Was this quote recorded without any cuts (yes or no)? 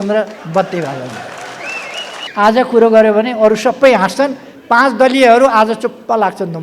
no